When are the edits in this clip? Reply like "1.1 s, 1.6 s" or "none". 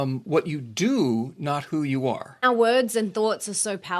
2.4 s